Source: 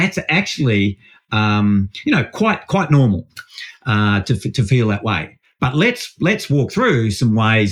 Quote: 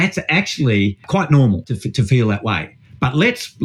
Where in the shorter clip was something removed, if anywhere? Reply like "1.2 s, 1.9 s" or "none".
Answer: 1.0 s, 1.7 s